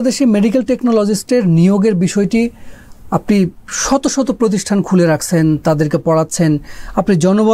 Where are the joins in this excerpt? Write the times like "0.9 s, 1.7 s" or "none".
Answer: none